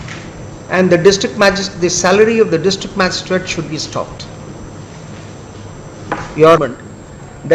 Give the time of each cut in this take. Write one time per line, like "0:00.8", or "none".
0:06.6